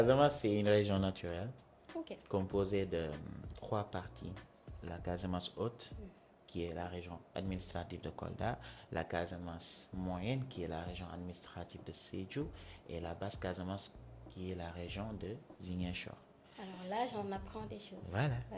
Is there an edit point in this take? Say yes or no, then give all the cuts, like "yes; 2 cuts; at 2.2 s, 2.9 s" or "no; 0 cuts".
no; 0 cuts